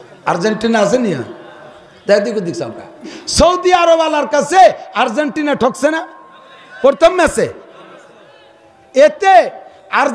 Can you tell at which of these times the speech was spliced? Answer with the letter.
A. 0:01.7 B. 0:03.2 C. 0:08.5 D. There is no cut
B